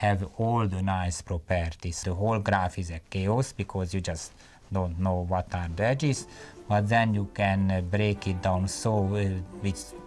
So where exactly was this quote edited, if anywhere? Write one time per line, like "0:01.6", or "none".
0:02.0